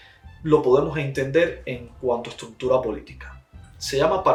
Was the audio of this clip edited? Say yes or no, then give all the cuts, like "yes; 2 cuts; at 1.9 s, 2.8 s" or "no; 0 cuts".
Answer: no; 0 cuts